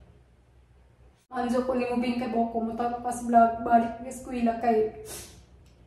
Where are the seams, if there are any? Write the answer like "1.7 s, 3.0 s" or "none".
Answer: 1.4 s